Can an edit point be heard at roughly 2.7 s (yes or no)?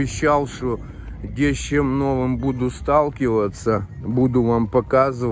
no